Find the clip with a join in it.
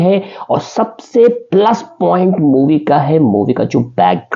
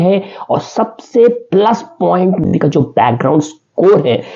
second; 1 cut; at 2.5 s

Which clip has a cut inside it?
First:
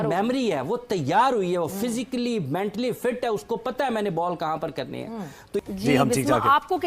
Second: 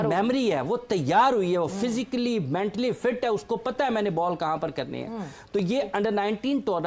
first; 1 cut; at 5.5 s

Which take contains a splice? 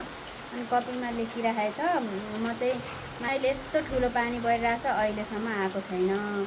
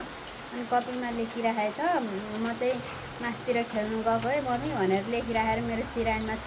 first; 1 cut; at 3.2 s

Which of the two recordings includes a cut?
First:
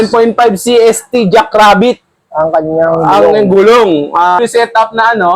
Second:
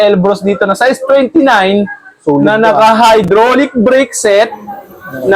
first; 1 cut; at 4.4 s

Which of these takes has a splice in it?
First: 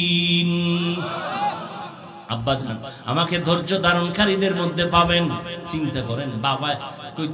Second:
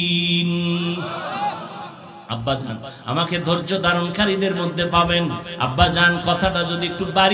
second; 1 cut; at 5.5 s

